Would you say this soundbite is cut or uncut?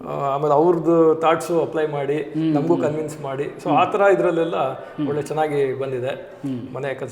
uncut